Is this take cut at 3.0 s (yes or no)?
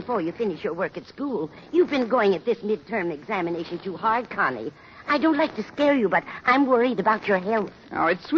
yes